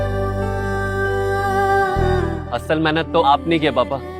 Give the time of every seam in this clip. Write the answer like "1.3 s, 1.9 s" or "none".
2.2 s